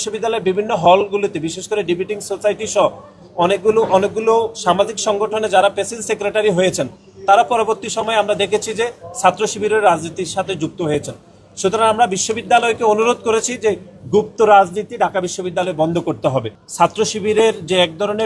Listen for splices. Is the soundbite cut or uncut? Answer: cut